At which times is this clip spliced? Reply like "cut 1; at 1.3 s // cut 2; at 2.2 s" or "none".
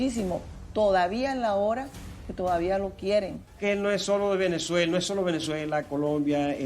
cut 1; at 3.5 s